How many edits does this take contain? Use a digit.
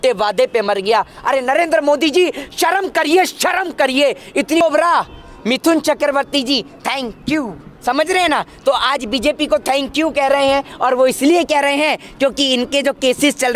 1